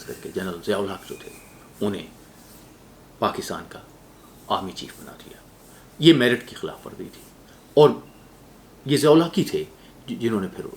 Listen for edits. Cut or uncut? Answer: uncut